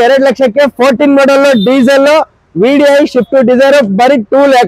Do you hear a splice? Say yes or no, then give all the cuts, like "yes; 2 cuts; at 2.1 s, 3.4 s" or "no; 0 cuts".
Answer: no; 0 cuts